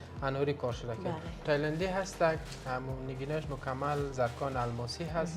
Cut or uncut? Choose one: cut